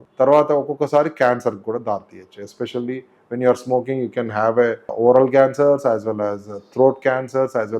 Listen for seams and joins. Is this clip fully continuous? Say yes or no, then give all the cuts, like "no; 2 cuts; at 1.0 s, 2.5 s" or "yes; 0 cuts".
no; 1 cut; at 4.9 s